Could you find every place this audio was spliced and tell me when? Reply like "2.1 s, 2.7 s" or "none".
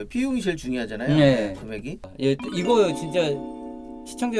2.0 s